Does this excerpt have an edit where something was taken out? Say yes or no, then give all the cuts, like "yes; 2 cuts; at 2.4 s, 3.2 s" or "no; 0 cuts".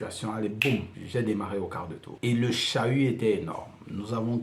yes; 2 cuts; at 1.0 s, 2.0 s